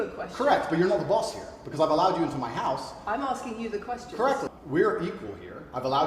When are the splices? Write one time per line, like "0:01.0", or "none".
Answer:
0:04.5